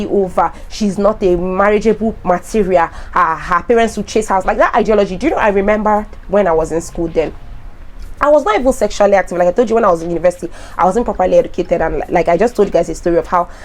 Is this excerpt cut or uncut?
uncut